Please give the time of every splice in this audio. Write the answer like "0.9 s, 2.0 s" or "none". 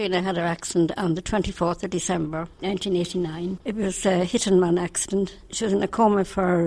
2.5 s, 3.6 s, 5.4 s